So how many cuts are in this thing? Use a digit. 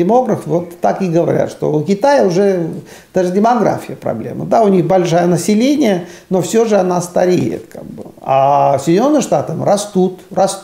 0